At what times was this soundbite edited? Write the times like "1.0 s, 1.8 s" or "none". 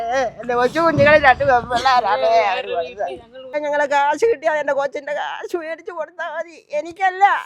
3.6 s